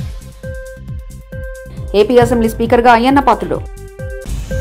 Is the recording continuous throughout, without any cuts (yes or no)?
no